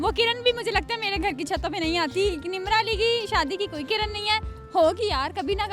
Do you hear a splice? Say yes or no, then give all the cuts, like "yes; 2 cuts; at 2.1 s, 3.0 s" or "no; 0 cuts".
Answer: no; 0 cuts